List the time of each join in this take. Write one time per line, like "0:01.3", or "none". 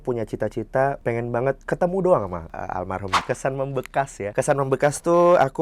0:01.0
0:03.0
0:04.3